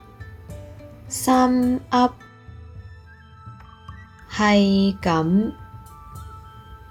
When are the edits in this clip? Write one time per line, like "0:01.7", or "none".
none